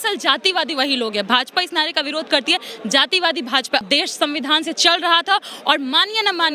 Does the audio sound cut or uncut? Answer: cut